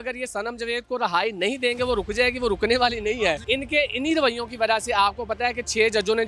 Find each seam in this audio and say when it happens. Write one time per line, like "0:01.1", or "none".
0:03.4

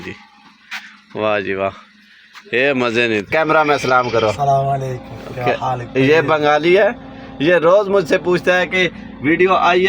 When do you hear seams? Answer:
0:03.3

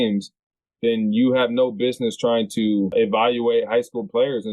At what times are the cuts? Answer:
0:02.9

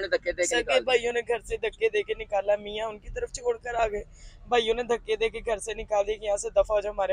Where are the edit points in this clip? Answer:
none

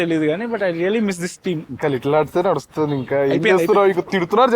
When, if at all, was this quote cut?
0:01.7

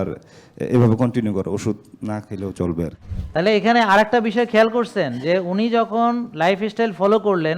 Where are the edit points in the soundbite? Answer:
0:03.0

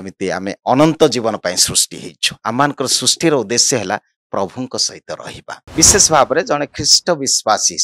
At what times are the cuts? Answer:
0:05.6

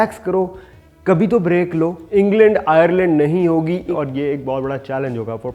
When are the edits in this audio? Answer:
0:02.0
0:03.9

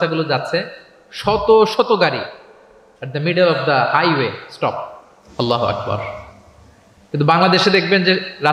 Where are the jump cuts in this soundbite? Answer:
none

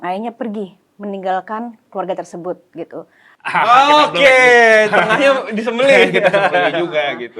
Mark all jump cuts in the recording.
0:03.3

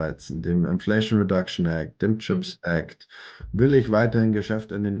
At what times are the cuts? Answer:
0:03.3

